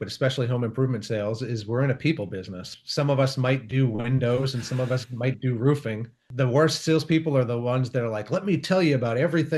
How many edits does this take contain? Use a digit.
2